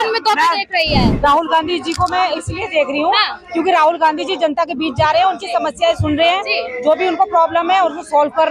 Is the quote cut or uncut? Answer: cut